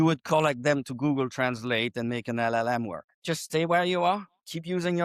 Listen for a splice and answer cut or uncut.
cut